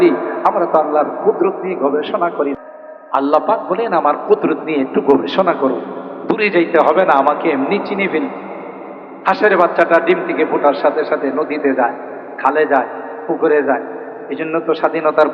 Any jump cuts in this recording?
yes; 1 cut; at 2.5 s

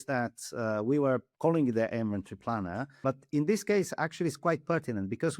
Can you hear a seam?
yes; 2 cuts; at 1.3 s, 3.0 s

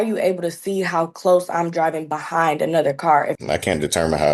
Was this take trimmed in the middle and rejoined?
yes; 1 cut; at 3.4 s

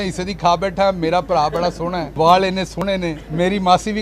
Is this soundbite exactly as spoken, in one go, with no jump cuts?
no; 2 cuts; at 2.0 s, 3.2 s

